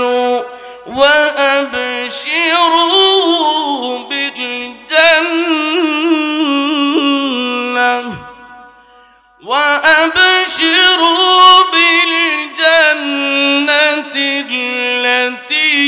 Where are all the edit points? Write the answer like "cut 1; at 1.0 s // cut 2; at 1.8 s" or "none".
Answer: none